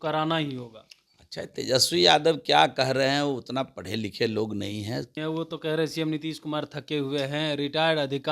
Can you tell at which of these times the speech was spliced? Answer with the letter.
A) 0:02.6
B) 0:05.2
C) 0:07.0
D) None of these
B